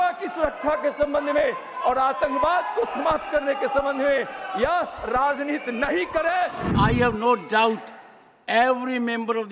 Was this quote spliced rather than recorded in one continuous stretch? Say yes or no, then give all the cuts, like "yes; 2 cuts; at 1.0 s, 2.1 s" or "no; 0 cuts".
yes; 1 cut; at 6.7 s